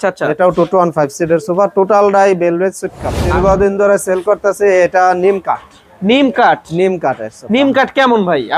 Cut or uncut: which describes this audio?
cut